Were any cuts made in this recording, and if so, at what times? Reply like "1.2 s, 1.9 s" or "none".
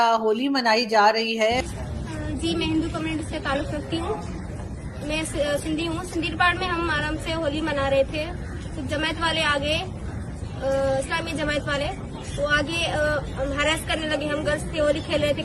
1.6 s